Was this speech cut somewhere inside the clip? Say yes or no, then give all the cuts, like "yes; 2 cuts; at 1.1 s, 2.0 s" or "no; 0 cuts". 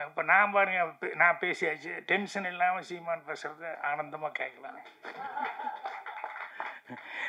no; 0 cuts